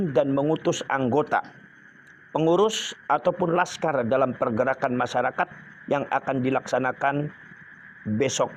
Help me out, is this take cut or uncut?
uncut